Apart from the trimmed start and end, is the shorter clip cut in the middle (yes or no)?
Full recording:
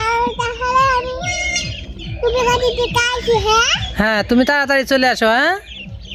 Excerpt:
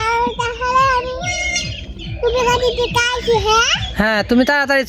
no